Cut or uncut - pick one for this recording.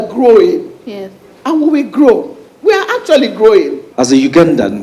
cut